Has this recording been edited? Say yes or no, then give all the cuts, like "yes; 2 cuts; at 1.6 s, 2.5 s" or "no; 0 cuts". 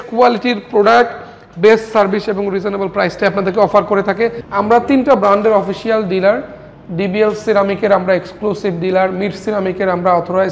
yes; 1 cut; at 4.4 s